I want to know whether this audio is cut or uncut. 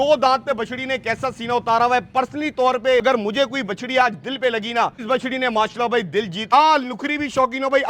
cut